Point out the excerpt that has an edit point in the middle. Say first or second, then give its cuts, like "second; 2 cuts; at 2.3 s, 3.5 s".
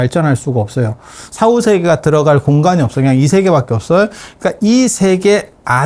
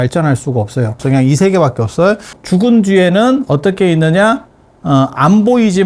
second; 2 cuts; at 1.0 s, 2.3 s